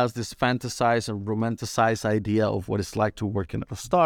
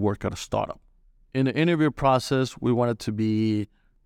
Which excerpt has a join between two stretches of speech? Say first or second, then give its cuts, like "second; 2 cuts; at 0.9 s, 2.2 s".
second; 1 cut; at 1.0 s